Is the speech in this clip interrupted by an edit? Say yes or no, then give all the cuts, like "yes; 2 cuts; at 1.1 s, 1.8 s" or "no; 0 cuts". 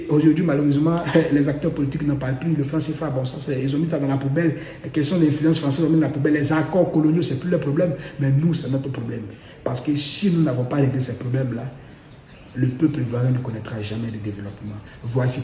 no; 0 cuts